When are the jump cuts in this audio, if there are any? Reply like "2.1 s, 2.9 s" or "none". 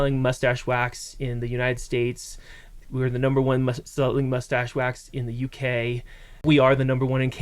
6.4 s